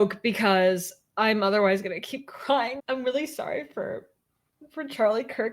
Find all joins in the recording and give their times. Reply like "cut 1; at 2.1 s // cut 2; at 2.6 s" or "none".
cut 1; at 2.8 s